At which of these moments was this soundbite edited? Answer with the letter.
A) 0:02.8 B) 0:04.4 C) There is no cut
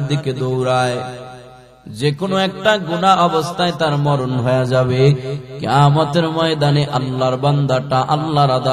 C